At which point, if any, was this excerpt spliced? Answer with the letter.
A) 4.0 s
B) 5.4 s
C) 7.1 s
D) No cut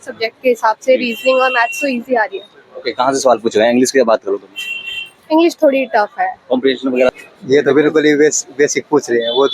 C